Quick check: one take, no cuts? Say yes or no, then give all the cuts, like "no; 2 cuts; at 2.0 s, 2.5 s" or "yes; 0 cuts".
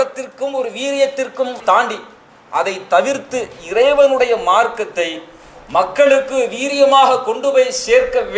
yes; 0 cuts